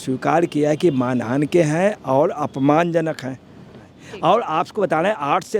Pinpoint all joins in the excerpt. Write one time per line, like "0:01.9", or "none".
0:03.9